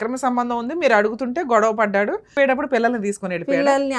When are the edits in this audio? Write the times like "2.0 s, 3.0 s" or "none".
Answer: 2.3 s